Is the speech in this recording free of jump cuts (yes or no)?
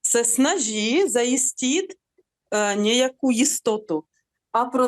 no